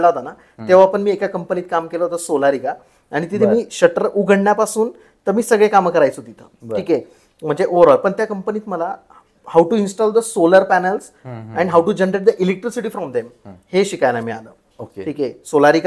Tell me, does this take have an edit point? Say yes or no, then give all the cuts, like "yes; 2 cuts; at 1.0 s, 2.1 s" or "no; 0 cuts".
no; 0 cuts